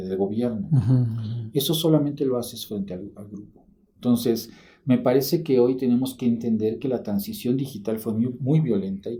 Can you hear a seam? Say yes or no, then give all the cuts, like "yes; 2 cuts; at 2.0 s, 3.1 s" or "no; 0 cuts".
no; 0 cuts